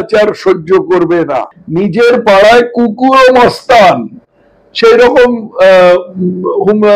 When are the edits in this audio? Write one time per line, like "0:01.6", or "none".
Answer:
0:01.6